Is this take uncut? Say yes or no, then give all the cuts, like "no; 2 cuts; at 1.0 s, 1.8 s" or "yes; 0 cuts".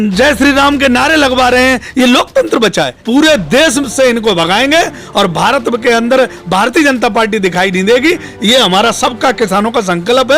no; 1 cut; at 3.0 s